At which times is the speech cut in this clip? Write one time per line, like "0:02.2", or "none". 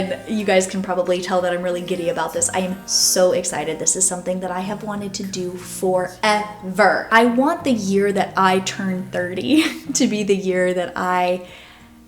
0:07.1